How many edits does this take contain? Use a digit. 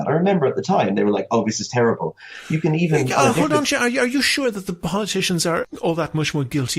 1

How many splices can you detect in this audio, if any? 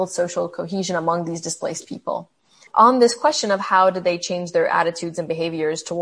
1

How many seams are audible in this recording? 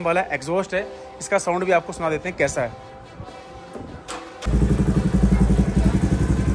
1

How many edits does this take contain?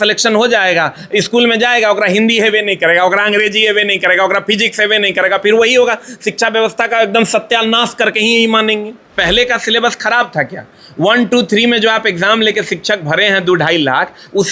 1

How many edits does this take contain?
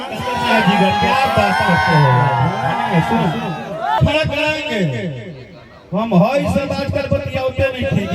1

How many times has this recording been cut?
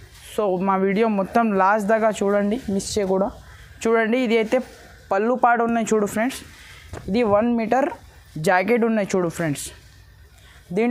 0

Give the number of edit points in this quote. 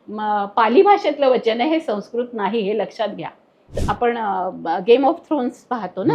1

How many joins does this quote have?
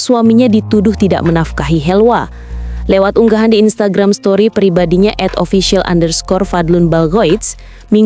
0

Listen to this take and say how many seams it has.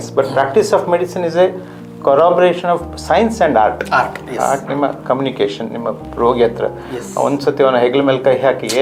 0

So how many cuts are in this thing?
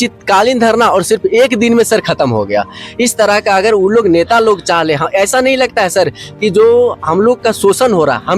0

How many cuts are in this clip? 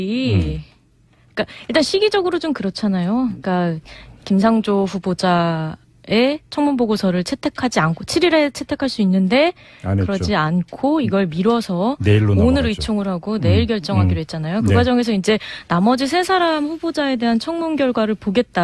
1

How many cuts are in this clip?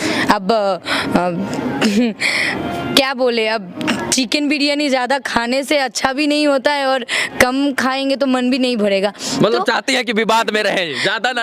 0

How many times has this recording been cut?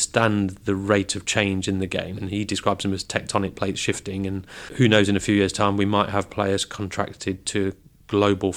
2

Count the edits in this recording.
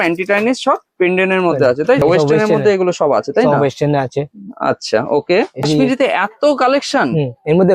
2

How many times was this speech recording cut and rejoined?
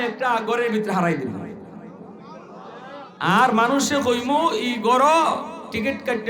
1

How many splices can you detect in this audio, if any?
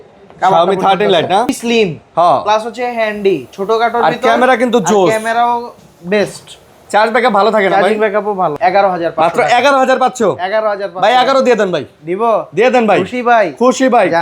2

